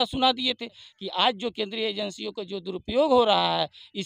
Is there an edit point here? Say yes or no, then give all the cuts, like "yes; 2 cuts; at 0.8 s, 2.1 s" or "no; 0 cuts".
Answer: yes; 1 cut; at 0.9 s